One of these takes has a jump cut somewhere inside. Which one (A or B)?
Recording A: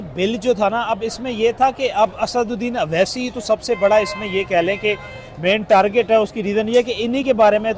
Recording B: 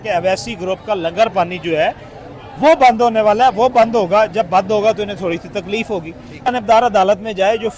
B